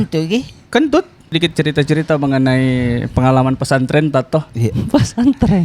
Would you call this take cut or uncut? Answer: cut